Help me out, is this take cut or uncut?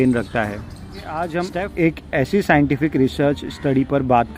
cut